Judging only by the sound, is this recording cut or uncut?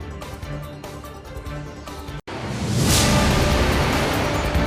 uncut